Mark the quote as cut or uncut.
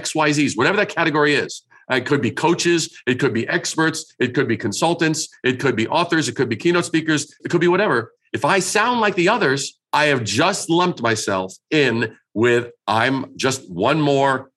cut